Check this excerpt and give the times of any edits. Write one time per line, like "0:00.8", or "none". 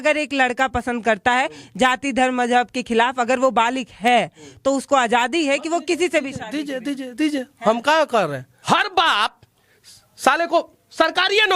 0:08.5